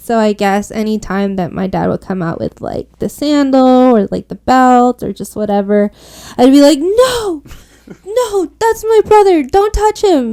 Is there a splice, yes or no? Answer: no